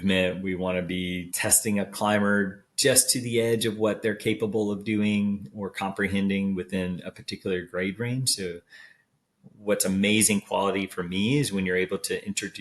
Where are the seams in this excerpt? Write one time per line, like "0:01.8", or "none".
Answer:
0:01.3